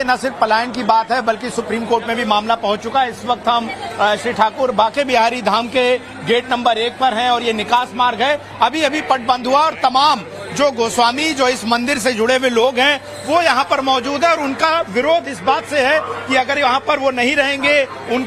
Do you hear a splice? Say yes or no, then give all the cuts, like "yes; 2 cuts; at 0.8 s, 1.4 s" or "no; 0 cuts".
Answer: no; 0 cuts